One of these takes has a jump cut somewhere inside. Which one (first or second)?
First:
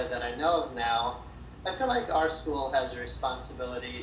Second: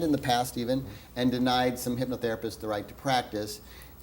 second